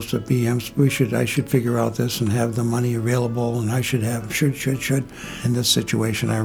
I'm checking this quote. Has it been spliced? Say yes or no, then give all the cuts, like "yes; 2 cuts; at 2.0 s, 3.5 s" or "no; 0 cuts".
yes; 1 cut; at 5.3 s